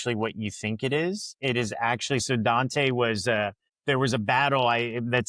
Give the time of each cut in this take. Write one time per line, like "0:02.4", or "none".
0:03.7